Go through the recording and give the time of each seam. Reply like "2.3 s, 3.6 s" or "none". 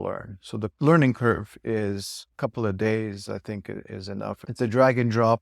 0.8 s, 2.3 s, 4.4 s